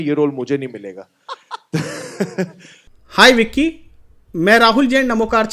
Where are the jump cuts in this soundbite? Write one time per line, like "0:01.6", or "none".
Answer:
0:03.0